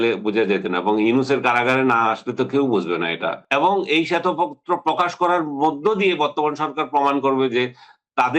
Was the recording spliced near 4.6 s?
no; 1 cut; at 3.4 s

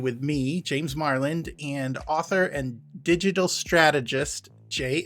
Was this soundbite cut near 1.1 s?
no; 1 cut; at 2.8 s

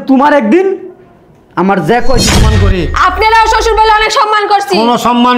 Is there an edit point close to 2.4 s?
yes; 1 cut; at 2.4 s

